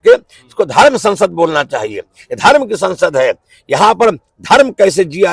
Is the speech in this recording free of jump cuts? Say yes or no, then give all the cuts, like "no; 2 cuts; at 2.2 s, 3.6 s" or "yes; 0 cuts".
yes; 0 cuts